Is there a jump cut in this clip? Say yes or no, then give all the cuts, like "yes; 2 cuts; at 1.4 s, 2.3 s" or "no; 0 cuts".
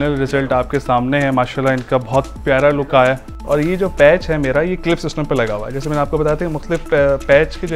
yes; 1 cut; at 3.3 s